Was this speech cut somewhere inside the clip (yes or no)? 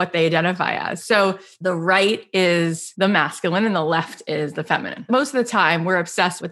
yes